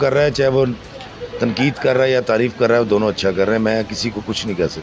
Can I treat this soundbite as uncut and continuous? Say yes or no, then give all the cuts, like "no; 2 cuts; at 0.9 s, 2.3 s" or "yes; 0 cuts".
yes; 0 cuts